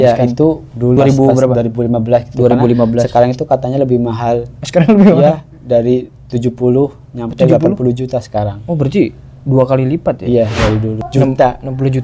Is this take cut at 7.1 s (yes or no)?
no